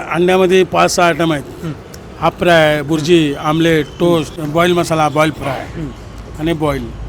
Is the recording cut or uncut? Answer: cut